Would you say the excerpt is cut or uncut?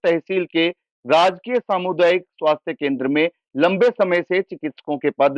uncut